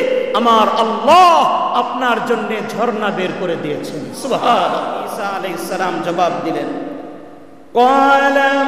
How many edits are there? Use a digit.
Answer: 1